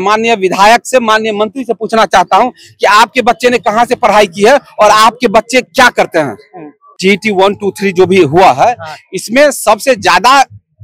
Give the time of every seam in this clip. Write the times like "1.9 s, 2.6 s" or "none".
6.9 s